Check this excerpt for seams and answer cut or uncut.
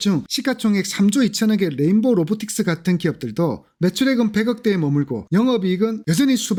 uncut